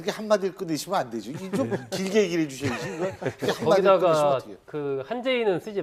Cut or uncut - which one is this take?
uncut